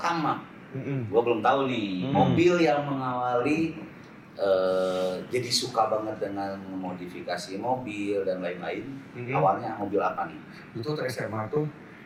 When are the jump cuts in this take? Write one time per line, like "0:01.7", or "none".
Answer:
none